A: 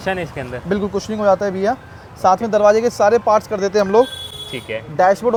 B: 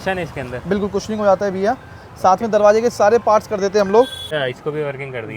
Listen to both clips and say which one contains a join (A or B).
B